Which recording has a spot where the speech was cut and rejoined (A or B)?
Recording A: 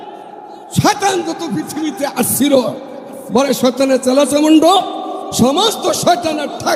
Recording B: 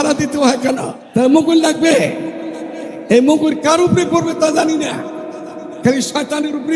B